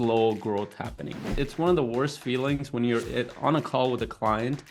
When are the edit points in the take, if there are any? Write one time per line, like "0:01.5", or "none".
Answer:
0:01.4